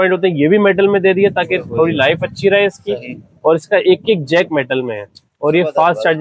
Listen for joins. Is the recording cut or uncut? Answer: uncut